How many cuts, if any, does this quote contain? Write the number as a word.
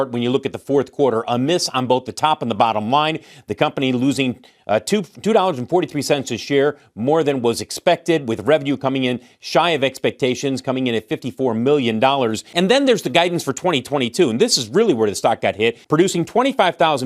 two